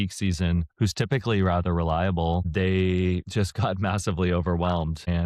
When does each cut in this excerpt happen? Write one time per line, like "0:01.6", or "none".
none